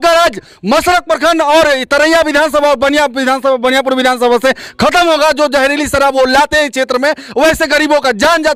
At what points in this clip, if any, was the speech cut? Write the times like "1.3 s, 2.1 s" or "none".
none